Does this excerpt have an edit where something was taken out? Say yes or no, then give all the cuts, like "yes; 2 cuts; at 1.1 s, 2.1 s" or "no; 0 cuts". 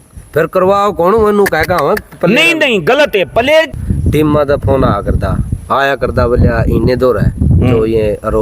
yes; 1 cut; at 3.8 s